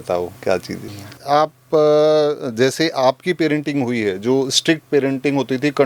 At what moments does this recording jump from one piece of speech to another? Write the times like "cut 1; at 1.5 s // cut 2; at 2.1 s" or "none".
cut 1; at 1.2 s